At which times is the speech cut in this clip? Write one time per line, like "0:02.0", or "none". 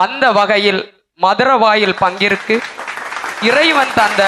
none